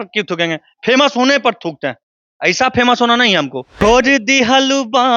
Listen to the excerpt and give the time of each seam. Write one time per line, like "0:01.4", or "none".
0:03.8